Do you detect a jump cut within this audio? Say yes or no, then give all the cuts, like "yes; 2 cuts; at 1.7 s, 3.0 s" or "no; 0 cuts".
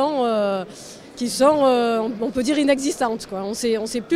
no; 0 cuts